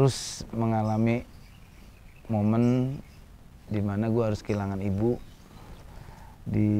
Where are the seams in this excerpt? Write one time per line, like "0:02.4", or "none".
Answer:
none